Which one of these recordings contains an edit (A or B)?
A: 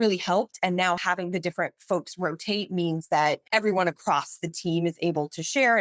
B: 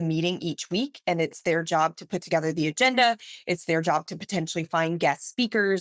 A